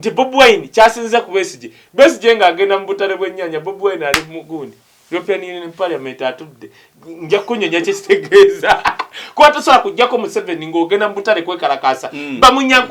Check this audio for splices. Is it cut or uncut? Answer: uncut